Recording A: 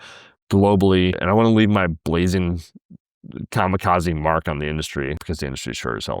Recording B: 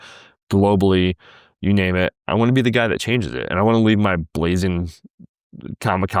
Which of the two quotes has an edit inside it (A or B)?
A